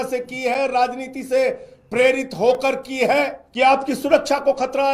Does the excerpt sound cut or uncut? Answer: cut